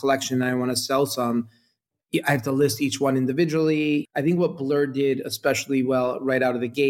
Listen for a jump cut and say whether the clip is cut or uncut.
cut